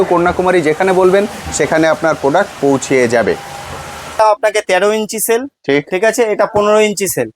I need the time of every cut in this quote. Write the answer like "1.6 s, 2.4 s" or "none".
4.2 s